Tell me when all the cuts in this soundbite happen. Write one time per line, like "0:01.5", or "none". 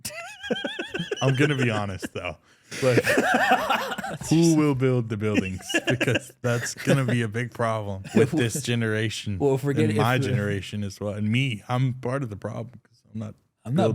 0:04.2
0:08.0